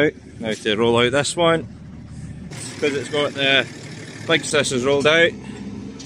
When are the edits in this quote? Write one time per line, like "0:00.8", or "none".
0:02.7
0:04.5